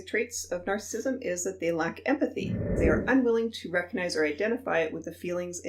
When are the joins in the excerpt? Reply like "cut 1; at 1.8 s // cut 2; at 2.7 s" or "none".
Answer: cut 1; at 2.7 s